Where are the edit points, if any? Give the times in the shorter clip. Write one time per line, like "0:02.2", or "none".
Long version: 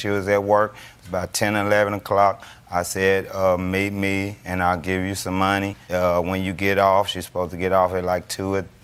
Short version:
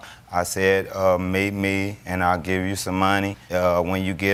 none